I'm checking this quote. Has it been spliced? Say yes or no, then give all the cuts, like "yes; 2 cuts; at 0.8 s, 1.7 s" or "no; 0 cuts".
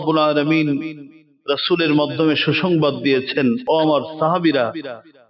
yes; 1 cut; at 3.6 s